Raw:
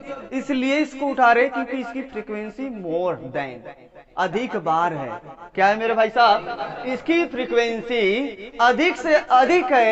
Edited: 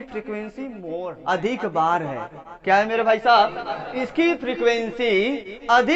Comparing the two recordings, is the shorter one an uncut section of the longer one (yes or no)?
no